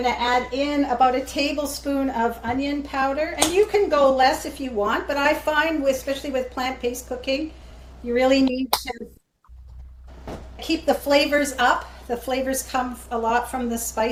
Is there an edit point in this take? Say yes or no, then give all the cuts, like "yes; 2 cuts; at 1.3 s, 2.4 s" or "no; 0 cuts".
no; 0 cuts